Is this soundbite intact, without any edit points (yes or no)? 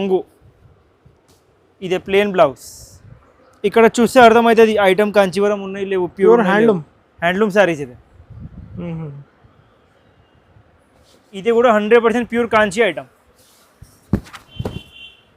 no